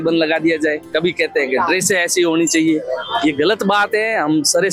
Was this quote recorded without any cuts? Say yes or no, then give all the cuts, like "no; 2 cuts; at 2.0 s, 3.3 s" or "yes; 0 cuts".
yes; 0 cuts